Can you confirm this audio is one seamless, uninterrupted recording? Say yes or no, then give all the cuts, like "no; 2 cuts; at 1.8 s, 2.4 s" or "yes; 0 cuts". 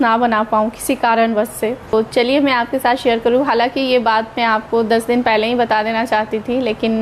no; 1 cut; at 1.9 s